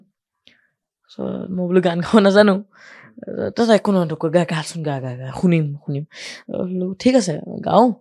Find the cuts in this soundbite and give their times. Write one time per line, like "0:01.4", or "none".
none